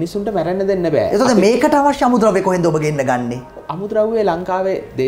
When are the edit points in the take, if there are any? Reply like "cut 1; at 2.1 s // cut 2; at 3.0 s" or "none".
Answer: none